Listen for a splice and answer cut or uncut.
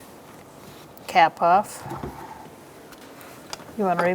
cut